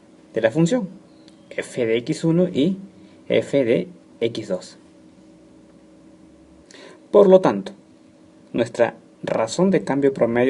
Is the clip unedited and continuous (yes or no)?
no